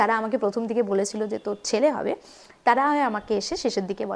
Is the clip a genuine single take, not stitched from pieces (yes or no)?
yes